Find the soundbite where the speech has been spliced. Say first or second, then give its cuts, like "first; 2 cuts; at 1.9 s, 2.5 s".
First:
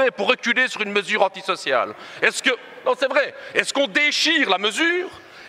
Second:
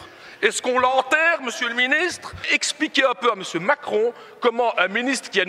second; 1 cut; at 2.5 s